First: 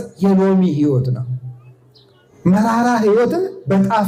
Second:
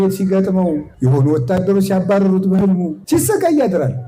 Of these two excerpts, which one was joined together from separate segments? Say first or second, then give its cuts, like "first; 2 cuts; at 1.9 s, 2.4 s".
second; 2 cuts; at 0.9 s, 2.9 s